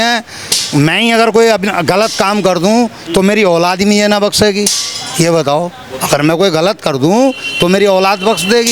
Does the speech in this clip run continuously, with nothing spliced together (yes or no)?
yes